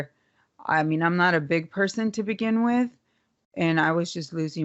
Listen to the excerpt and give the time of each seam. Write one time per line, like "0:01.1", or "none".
none